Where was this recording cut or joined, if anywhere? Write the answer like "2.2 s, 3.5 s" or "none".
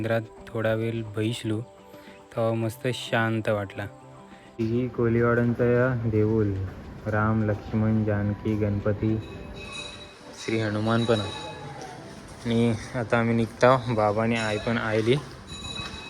4.6 s